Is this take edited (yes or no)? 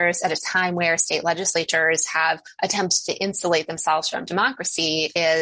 no